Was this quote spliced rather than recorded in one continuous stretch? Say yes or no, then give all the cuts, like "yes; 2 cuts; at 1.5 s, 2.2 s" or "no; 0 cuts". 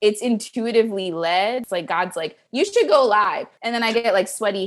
yes; 2 cuts; at 1.7 s, 3.5 s